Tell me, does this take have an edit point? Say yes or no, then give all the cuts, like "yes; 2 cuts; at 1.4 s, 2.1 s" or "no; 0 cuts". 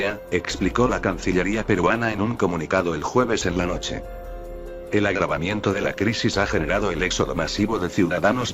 yes; 1 cut; at 1.7 s